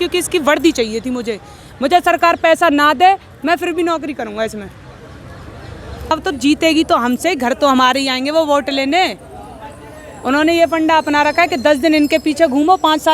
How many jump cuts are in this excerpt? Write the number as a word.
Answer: one